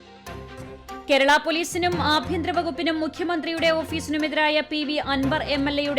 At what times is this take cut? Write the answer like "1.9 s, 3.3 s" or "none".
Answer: 1.0 s